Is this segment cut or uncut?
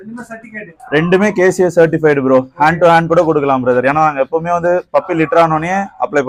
uncut